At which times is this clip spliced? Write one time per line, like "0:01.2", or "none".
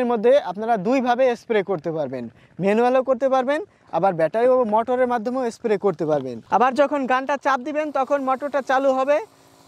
0:06.4